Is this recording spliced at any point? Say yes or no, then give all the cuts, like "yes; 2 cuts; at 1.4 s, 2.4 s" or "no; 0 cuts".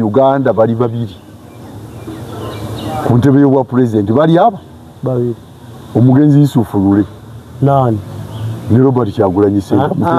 no; 0 cuts